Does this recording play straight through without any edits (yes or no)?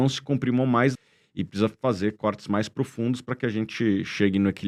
no